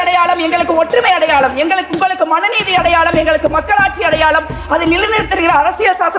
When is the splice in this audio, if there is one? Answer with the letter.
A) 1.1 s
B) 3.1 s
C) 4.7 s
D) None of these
D